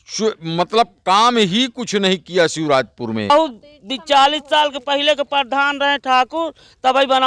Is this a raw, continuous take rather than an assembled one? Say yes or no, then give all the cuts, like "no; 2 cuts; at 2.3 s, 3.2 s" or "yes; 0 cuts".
no; 1 cut; at 3.3 s